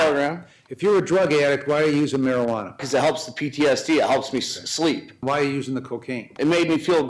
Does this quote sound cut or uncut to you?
cut